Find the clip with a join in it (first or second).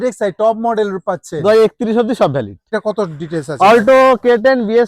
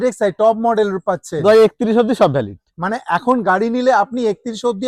first